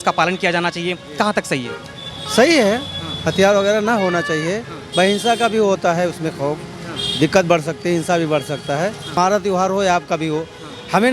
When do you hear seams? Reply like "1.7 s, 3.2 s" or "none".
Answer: 9.1 s